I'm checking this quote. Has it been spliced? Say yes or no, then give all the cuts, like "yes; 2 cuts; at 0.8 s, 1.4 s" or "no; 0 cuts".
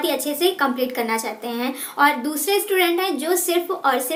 no; 0 cuts